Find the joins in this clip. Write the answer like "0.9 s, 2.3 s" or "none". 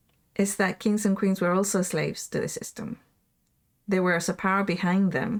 none